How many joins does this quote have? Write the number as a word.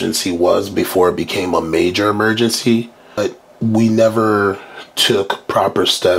one